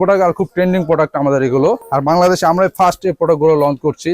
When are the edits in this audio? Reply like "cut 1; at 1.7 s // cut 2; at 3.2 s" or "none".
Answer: cut 1; at 1.8 s

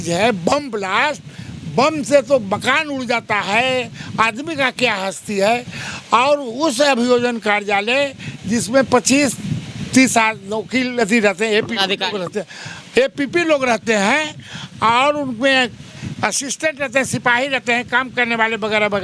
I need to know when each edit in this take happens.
none

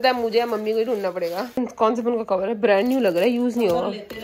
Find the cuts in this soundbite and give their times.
cut 1; at 1.6 s

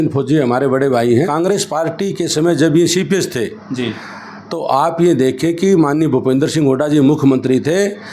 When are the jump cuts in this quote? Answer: cut 1; at 1.3 s

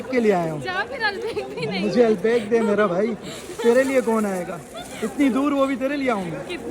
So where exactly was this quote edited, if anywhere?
none

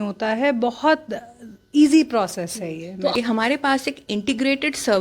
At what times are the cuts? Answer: cut 1; at 3.1 s

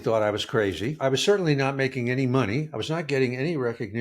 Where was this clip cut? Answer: cut 1; at 1.0 s

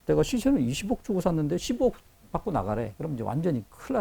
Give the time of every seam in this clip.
cut 1; at 2.1 s

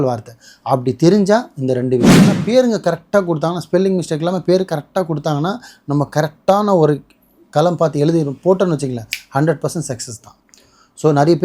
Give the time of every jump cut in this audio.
cut 1; at 2.3 s

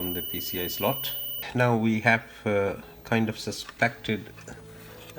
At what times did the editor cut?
cut 1; at 1.5 s

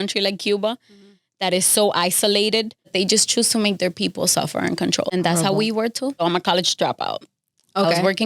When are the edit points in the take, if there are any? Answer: cut 1; at 2.9 s // cut 2; at 5.1 s // cut 3; at 6.2 s

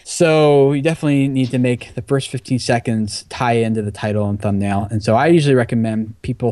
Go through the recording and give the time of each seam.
none

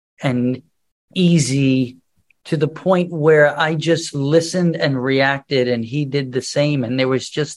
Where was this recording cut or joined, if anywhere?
none

